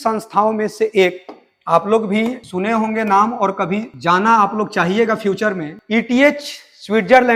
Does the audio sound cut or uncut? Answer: uncut